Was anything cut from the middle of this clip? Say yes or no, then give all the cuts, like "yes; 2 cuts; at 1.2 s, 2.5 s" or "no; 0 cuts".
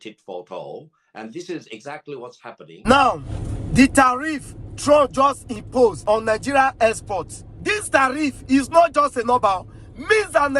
yes; 1 cut; at 2.7 s